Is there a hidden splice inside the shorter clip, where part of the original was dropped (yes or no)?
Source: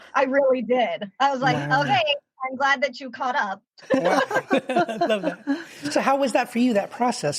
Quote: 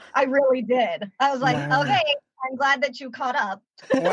no